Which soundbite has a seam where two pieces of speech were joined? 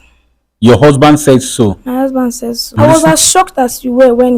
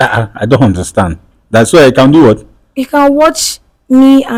first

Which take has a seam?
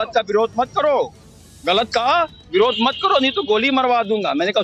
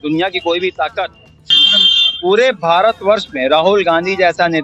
second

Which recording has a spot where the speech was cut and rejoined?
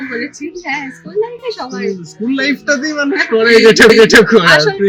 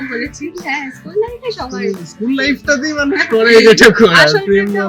second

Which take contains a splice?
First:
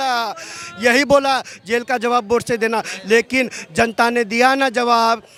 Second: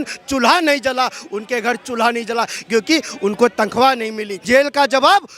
second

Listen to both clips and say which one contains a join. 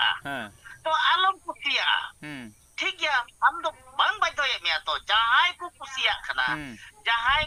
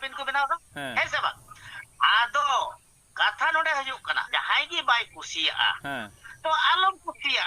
second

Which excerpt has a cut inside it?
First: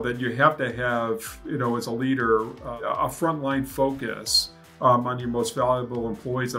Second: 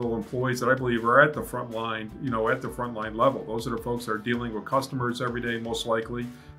first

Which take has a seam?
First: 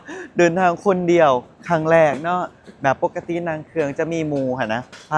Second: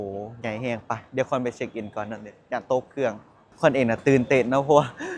second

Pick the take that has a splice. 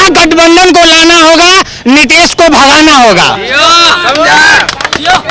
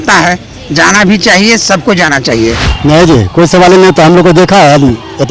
second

